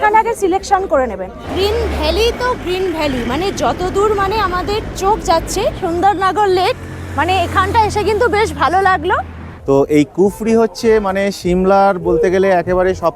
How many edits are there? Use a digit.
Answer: 3